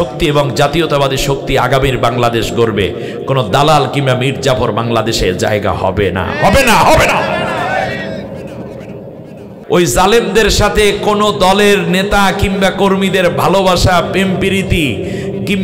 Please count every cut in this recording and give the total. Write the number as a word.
one